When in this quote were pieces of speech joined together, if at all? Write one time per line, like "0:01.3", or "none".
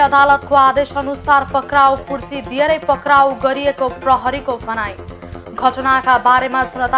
none